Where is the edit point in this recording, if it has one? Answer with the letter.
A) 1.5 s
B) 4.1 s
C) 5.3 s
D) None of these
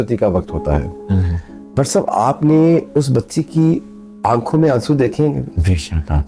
D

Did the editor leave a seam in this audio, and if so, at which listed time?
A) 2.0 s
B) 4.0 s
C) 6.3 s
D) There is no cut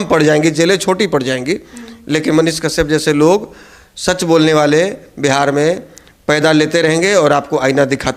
D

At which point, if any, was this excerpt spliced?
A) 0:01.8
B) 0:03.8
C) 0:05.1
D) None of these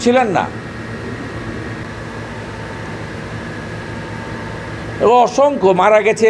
A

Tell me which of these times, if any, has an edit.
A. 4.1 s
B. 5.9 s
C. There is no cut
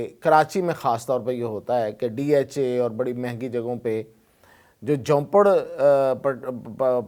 C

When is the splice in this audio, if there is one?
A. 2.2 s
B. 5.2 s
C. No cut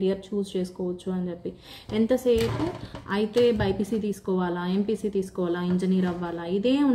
C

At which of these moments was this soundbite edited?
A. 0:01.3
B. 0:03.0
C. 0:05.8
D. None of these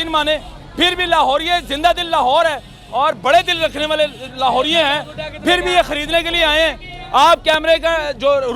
D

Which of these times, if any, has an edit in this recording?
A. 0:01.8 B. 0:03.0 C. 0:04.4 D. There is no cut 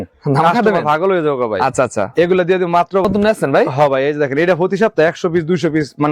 B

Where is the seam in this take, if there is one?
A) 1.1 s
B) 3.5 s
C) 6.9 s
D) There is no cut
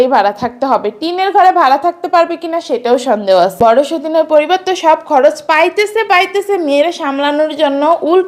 B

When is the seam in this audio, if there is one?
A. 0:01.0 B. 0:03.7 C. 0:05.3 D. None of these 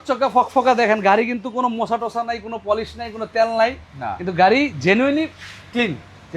D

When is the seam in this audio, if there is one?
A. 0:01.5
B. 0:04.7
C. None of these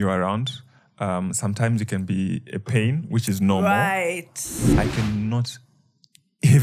B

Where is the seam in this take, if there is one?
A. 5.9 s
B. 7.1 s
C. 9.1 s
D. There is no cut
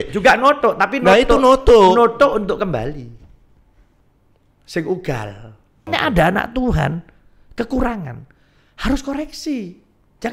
A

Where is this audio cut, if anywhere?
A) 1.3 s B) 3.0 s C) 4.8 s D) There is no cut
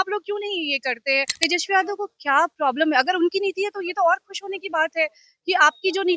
A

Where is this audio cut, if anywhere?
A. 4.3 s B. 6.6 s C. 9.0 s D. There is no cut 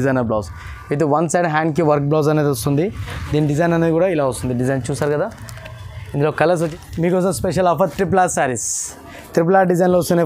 B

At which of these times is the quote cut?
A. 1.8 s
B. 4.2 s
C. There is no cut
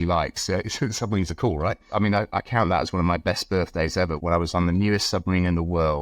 A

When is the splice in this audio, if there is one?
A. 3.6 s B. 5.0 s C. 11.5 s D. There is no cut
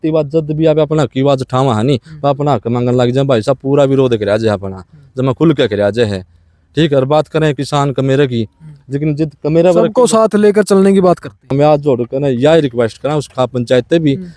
C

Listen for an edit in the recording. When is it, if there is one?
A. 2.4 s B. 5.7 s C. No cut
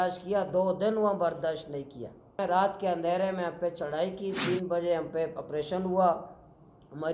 A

